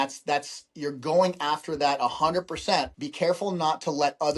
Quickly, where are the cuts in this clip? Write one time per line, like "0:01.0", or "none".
0:03.0